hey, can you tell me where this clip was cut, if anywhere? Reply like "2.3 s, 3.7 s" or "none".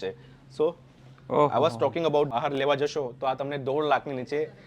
2.3 s